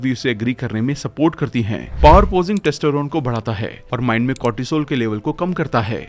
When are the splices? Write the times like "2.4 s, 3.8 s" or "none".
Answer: 1.8 s